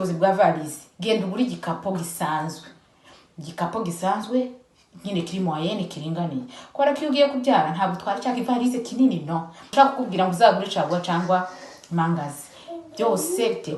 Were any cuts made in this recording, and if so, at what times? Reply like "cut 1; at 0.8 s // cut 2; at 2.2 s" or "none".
cut 1; at 9.7 s